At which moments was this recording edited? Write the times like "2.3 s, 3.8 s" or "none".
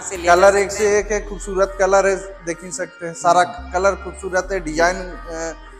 none